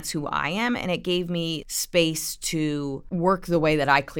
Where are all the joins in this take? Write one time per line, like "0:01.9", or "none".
0:01.7
0:03.0